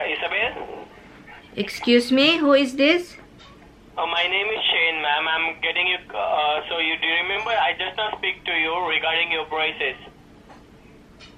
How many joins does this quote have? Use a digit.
0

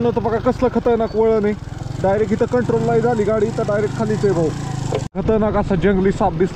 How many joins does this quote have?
1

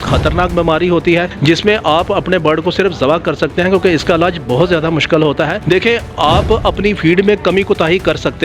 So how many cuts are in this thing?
1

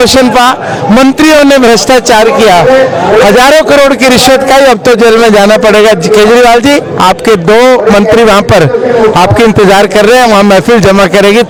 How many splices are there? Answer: 0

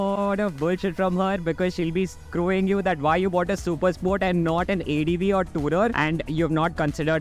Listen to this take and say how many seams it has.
1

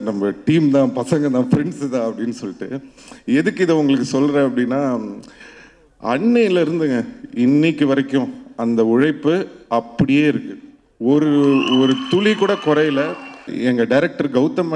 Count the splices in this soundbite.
1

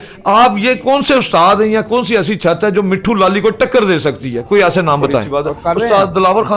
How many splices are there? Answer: 1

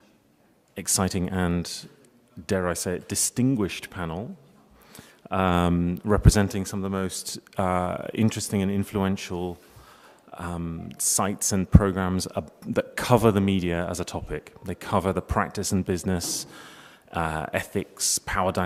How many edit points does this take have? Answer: 0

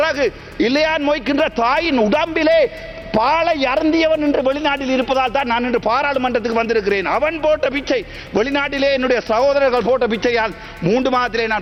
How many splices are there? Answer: 0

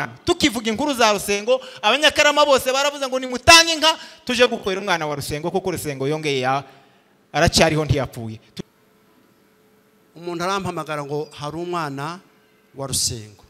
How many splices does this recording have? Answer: 1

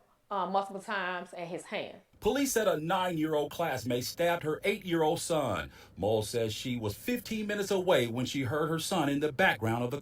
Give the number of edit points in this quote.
1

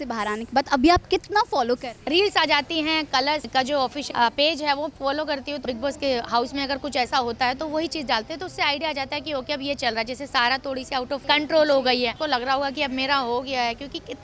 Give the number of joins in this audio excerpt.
5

